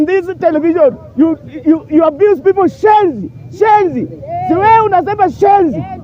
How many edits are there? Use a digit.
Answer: 0